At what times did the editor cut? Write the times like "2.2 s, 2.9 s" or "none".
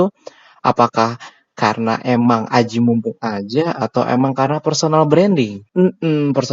5.6 s